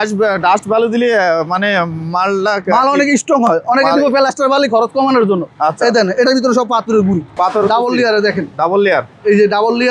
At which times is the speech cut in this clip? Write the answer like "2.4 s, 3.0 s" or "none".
7.3 s